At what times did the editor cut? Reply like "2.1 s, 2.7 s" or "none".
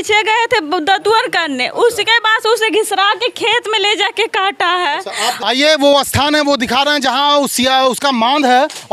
5.4 s